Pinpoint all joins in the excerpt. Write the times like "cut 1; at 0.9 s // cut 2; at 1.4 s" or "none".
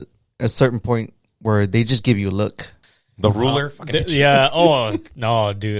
cut 1; at 2.8 s